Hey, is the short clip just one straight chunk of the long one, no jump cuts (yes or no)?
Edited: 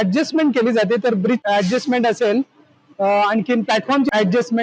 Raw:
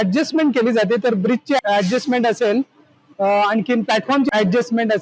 no